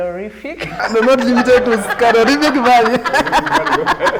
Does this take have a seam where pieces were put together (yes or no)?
no